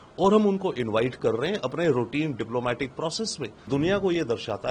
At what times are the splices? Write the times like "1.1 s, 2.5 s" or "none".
3.7 s